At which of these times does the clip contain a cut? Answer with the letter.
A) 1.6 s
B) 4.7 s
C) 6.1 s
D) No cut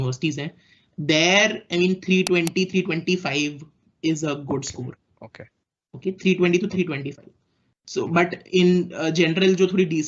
D